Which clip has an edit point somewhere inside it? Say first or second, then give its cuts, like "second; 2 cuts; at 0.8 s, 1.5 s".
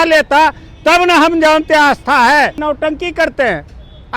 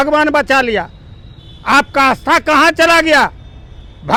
first; 1 cut; at 2.6 s